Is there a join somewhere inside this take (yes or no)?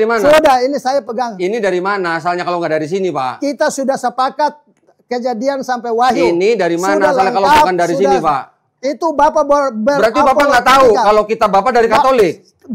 no